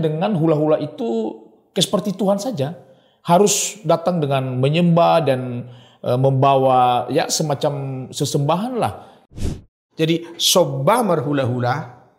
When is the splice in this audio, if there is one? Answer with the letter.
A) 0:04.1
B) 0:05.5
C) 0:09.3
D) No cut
C